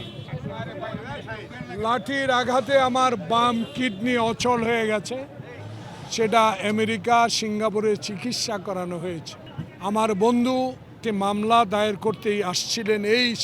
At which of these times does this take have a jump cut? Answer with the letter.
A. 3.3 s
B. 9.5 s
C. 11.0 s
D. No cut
C